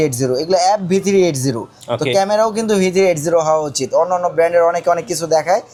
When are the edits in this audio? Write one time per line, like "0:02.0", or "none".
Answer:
none